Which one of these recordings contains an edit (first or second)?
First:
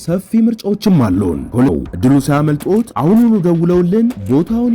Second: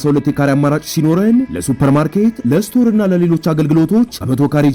first